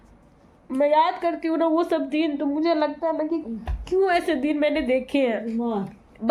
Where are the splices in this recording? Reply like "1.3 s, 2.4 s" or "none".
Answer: none

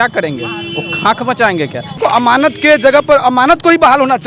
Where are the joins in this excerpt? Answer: 2.0 s

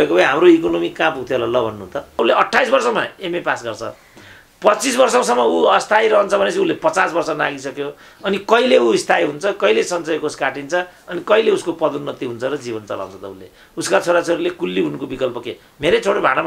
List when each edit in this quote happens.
2.2 s

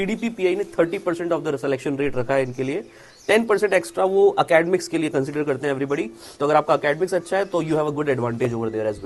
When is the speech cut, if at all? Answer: none

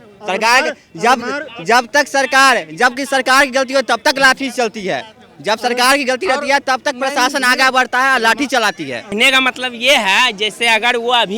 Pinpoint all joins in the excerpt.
9.1 s

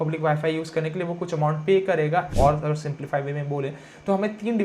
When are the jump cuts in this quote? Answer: 2.3 s

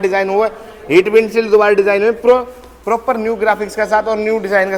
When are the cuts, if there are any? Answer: none

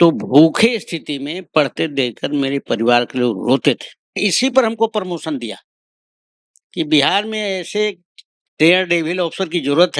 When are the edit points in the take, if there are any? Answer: 4.2 s

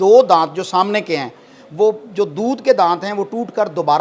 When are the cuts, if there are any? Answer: none

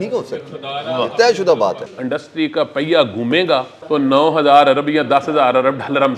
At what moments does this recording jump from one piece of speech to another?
1.9 s, 3.8 s

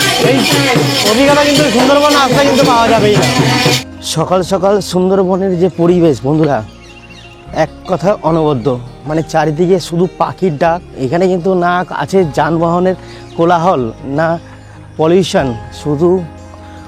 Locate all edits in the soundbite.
3.8 s, 10.9 s

